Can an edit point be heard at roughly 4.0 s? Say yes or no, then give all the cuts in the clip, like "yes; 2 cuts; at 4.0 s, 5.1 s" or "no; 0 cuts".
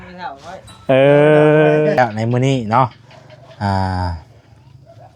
no; 1 cut; at 2.0 s